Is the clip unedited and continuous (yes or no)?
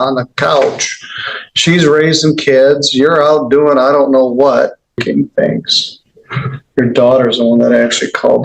no